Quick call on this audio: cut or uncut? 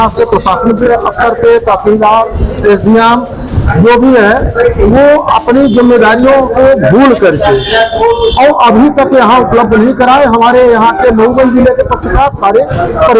uncut